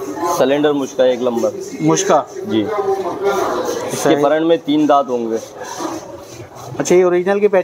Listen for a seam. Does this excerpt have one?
no; 0 cuts

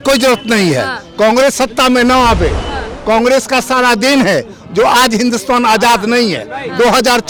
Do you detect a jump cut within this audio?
no; 0 cuts

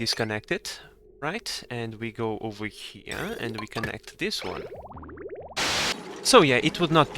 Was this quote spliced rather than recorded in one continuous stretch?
yes; 1 cut; at 5.7 s

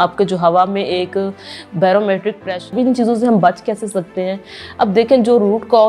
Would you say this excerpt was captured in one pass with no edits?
no; 1 cut; at 2.7 s

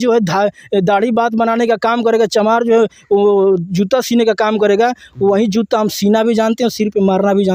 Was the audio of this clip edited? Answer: no; 0 cuts

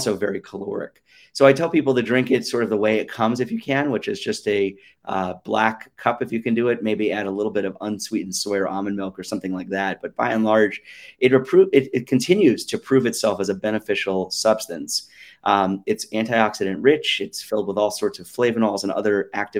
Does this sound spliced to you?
no; 0 cuts

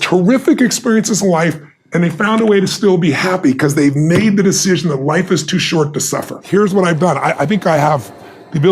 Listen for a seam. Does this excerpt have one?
yes; 1 cut; at 6.3 s

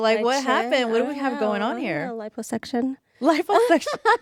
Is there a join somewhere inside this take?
no; 0 cuts

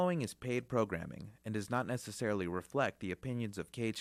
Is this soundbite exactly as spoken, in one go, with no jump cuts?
yes; 0 cuts

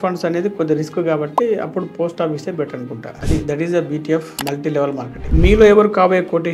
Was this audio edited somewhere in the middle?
yes; 2 cuts; at 3.1 s, 5.3 s

